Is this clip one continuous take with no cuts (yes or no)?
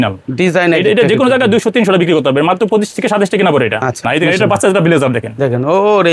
no